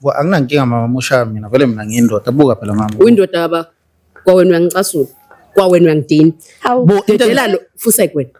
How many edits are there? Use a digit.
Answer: 0